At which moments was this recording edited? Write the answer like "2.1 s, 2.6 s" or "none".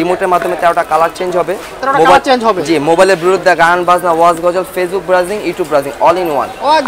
none